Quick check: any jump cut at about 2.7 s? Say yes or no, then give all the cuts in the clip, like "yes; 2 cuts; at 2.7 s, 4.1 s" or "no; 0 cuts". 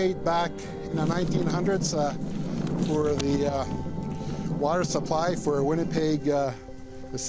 yes; 1 cut; at 2.7 s